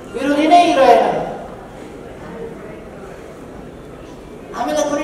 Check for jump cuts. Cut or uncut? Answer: uncut